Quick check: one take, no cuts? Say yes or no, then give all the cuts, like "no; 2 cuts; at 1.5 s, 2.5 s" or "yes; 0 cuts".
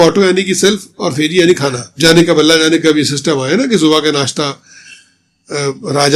no; 1 cut; at 1.9 s